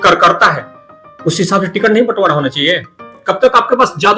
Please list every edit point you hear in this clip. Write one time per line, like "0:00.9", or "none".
0:03.2

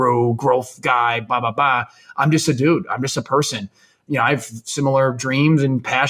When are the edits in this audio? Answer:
0:04.1

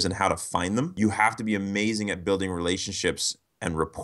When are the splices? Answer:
0:00.9

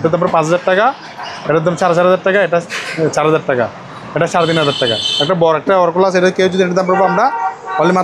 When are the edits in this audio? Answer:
none

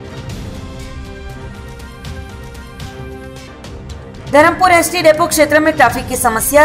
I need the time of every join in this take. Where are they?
0:03.1

